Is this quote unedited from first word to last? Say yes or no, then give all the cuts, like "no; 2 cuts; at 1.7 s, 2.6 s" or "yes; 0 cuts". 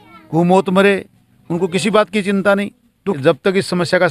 no; 1 cut; at 3.2 s